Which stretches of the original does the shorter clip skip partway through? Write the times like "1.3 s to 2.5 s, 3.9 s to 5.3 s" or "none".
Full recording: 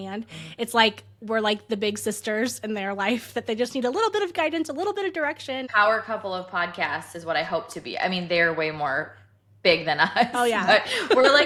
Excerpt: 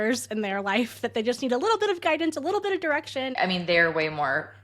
5.7 s to 7.9 s